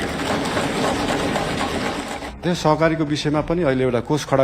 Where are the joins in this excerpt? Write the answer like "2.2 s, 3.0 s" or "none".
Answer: 2.4 s

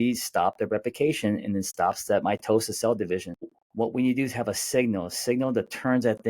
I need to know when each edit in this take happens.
3.6 s

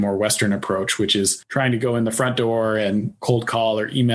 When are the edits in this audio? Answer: 1.4 s, 3.2 s

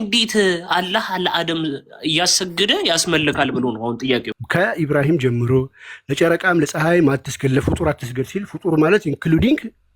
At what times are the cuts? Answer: 4.4 s

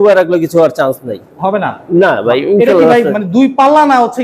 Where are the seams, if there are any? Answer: none

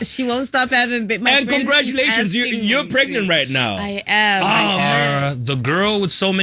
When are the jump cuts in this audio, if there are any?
4.8 s

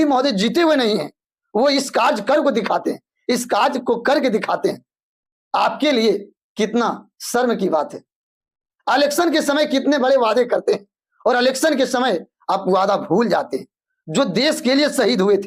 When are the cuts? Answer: none

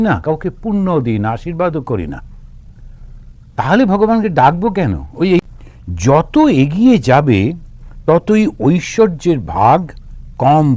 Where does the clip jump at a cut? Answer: 5.5 s

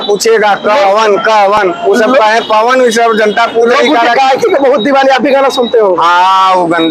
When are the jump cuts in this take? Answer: none

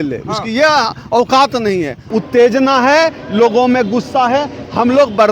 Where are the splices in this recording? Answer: 2.0 s

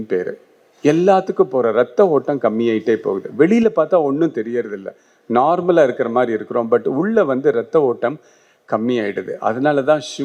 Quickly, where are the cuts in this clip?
none

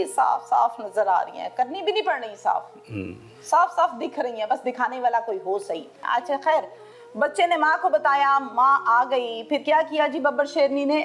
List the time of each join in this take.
none

